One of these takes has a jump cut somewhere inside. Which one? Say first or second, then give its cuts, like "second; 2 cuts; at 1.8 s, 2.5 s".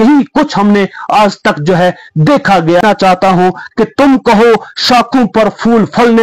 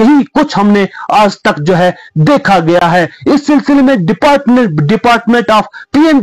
first; 1 cut; at 2.8 s